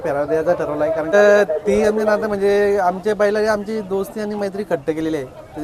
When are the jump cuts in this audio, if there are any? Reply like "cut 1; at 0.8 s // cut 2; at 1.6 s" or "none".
cut 1; at 1.1 s